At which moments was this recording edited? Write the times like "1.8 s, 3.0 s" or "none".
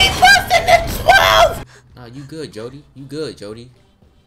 1.6 s